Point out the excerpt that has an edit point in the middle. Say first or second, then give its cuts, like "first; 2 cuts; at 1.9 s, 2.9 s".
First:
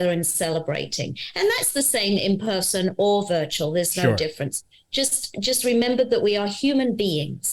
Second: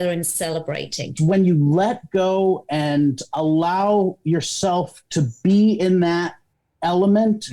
second; 1 cut; at 1.2 s